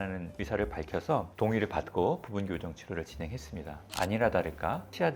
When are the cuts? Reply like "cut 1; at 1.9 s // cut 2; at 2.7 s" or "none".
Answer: cut 1; at 3.8 s